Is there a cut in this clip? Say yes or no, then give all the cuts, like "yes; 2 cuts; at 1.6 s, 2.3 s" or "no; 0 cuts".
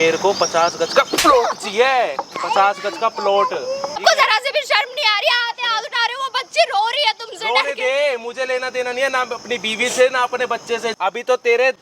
yes; 2 cuts; at 4.0 s, 10.9 s